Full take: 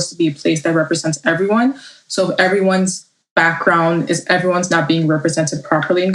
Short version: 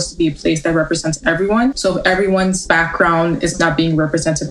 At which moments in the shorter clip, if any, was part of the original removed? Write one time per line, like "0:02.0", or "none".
0:01.8
0:02.6
0:03.6